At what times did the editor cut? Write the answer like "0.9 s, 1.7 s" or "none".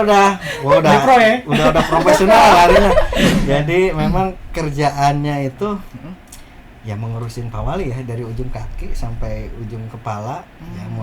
3.3 s